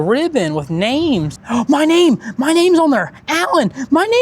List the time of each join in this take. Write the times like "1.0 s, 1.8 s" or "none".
1.4 s